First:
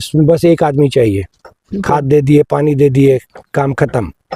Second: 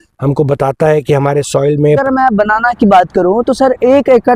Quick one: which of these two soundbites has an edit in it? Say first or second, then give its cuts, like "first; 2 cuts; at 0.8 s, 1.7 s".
second; 1 cut; at 2.0 s